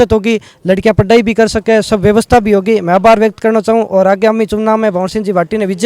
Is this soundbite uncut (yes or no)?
yes